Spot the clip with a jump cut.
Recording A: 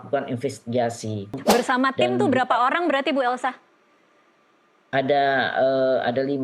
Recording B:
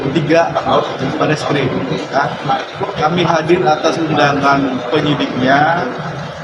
A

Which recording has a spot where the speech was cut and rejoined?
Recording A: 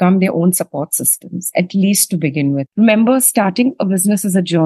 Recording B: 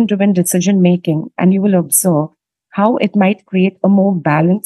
A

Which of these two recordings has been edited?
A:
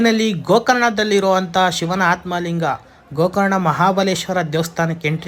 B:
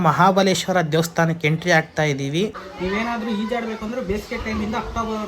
B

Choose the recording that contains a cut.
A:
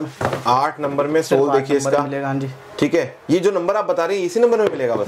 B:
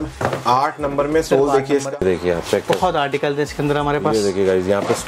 B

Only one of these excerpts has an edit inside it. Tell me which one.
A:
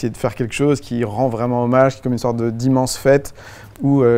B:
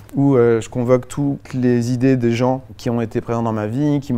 B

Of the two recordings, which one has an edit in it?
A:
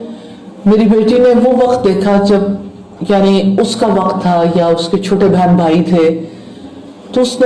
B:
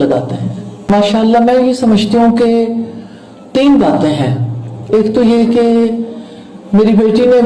B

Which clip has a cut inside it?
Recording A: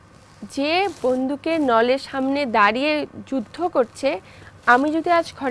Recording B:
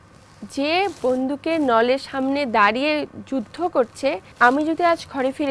B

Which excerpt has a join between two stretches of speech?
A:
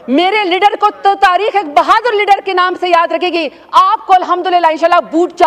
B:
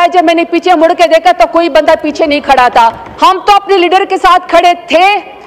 B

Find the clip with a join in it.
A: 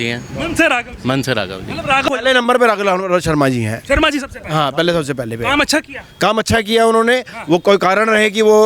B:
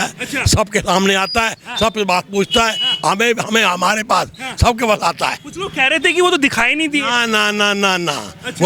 A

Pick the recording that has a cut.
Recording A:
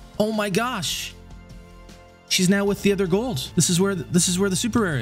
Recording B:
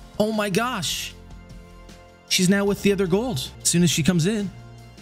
A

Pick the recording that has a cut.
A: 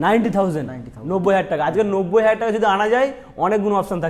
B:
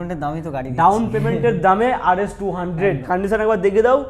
B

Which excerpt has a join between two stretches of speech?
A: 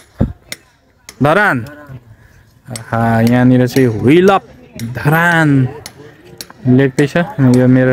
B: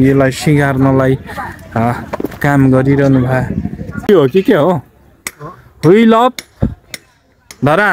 B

